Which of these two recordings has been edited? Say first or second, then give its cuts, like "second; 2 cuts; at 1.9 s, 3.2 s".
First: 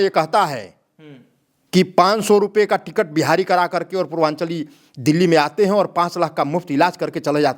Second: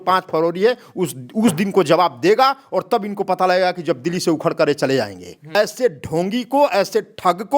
second; 1 cut; at 5.6 s